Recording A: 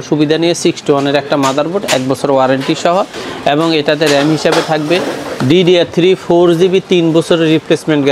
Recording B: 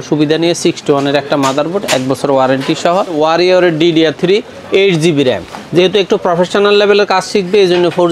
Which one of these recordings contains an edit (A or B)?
B